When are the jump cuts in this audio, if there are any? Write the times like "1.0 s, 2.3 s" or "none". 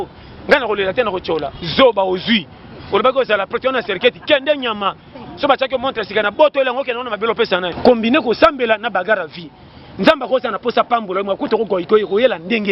7.7 s